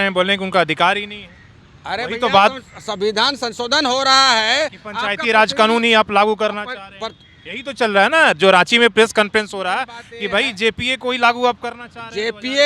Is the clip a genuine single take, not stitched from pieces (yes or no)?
yes